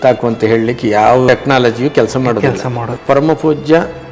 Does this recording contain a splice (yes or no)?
yes